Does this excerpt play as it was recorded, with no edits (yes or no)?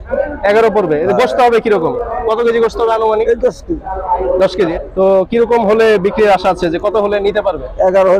no